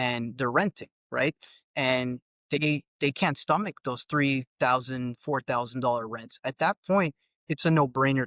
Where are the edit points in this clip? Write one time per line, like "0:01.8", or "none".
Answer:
0:06.3